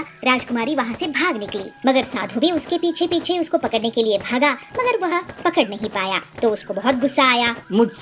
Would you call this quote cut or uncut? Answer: uncut